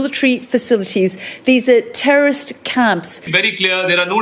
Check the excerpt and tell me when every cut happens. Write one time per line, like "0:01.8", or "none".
0:03.2

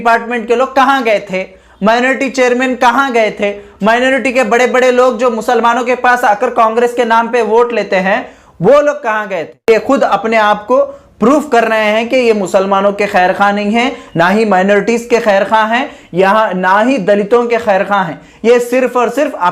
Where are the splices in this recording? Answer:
0:09.5

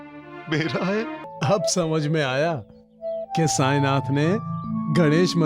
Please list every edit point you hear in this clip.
0:01.3

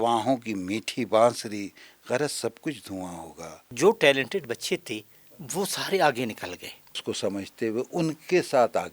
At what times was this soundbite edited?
0:03.7
0:07.0

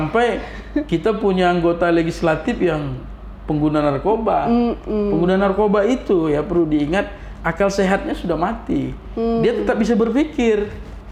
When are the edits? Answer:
none

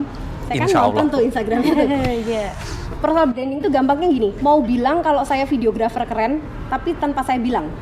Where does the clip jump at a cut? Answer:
none

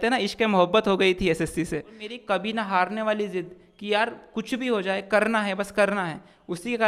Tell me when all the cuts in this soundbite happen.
0:02.1

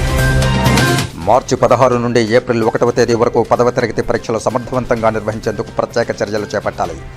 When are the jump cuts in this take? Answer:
0:01.1

